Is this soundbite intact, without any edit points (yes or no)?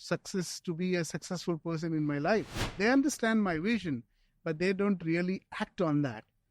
no